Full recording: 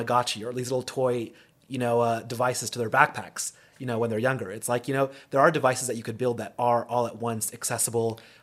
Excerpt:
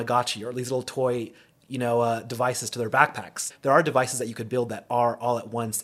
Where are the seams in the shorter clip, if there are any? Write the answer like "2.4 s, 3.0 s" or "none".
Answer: 3.5 s